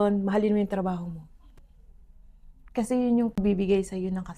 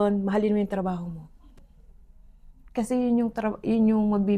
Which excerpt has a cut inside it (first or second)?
first